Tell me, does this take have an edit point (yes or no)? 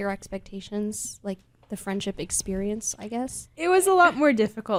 no